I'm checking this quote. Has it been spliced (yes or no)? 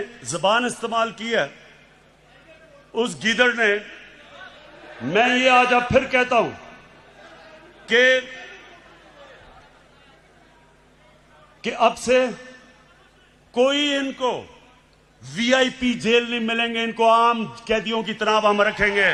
no